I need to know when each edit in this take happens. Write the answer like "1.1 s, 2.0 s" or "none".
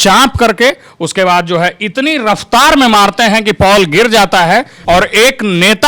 4.7 s